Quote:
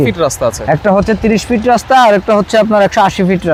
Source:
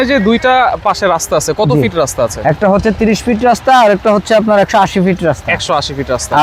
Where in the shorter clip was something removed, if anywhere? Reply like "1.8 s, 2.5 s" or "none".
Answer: none